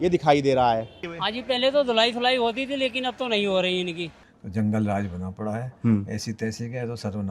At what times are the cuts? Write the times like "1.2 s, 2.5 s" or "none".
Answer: 1.0 s, 4.1 s

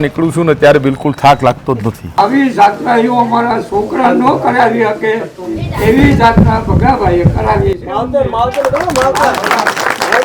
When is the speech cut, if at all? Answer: 2.2 s

